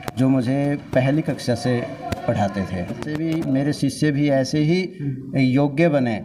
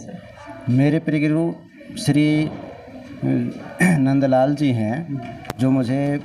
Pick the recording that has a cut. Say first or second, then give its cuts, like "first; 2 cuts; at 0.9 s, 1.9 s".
first; 1 cut; at 3.1 s